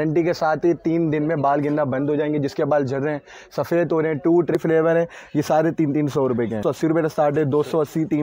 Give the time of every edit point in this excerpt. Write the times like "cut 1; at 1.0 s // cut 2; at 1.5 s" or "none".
cut 1; at 4.6 s // cut 2; at 6.6 s